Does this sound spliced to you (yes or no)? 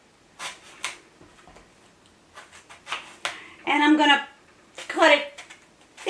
no